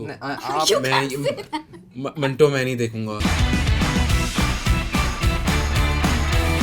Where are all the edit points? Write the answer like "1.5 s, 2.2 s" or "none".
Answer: 3.1 s